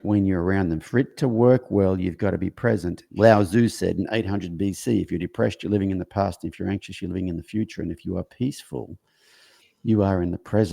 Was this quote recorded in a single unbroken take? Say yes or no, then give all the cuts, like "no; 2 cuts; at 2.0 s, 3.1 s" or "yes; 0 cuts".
no; 1 cut; at 3.0 s